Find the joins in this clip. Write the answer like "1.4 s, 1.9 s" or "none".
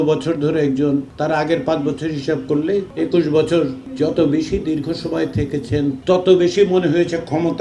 1.1 s, 2.9 s, 3.8 s, 6.0 s